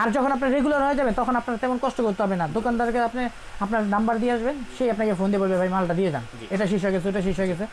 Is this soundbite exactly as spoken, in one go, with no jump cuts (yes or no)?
yes